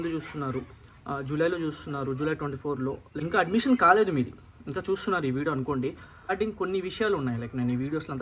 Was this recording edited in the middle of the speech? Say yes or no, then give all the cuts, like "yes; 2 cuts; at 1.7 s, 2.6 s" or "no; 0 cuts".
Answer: yes; 2 cuts; at 3.1 s, 6.3 s